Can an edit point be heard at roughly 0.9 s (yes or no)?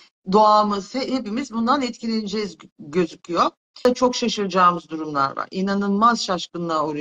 no